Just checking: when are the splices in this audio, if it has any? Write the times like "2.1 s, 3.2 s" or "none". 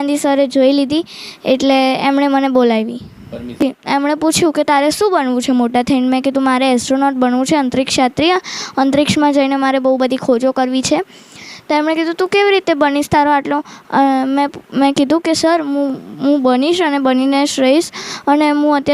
3.6 s